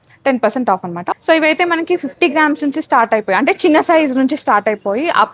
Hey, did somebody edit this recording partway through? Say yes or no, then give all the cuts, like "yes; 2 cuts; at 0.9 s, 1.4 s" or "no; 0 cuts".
yes; 1 cut; at 1.1 s